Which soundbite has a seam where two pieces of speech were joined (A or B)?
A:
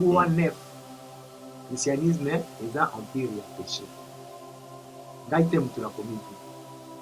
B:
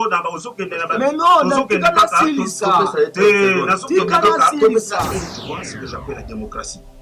B